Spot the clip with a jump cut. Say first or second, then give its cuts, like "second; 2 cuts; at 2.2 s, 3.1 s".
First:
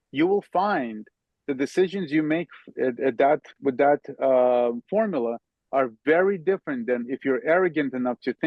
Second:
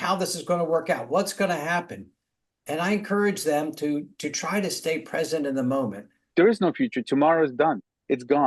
second; 1 cut; at 6.1 s